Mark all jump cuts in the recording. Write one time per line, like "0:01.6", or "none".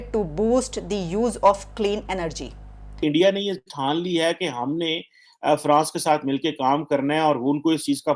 0:02.8